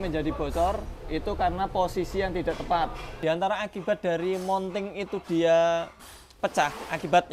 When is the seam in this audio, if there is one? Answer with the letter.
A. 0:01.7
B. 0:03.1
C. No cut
B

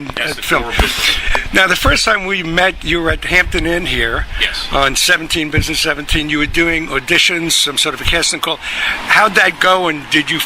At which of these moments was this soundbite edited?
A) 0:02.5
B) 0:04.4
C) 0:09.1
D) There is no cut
C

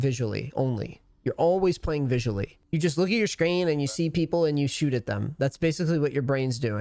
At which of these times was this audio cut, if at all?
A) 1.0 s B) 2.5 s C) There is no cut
B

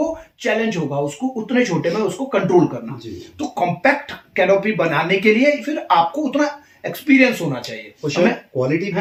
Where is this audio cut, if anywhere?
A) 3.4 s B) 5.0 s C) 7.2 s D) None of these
D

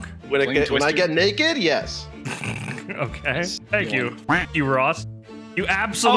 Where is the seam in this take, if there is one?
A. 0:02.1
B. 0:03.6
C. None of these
B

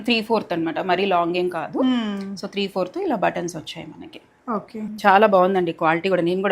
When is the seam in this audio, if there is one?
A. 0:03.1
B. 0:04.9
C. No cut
B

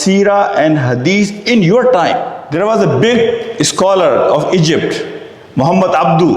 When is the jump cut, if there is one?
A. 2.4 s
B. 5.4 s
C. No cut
A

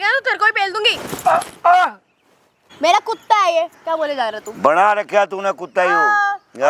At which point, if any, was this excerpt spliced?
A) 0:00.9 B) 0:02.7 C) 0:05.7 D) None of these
B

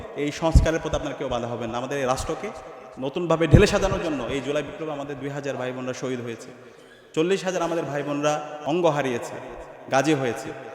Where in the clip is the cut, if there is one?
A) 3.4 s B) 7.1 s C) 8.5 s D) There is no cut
C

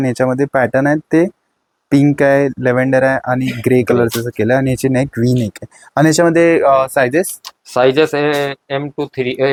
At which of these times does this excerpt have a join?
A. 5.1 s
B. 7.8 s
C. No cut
C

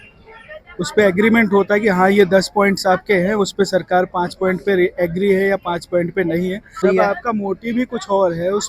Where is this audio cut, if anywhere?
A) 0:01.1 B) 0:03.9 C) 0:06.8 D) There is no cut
C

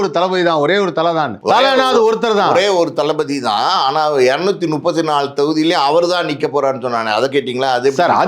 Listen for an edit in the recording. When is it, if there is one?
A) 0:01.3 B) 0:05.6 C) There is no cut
A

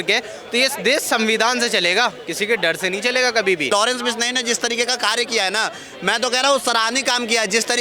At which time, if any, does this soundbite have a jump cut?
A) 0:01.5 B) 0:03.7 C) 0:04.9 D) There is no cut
B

